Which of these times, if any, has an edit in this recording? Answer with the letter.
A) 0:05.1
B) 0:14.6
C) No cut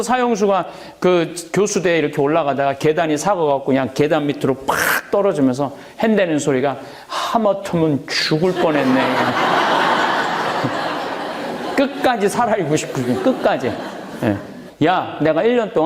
B